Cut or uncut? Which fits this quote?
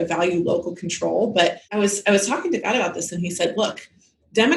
cut